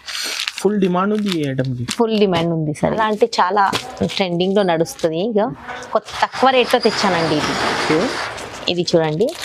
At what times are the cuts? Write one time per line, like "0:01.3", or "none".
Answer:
0:02.9